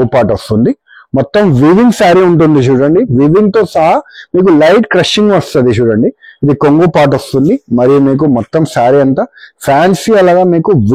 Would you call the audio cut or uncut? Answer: uncut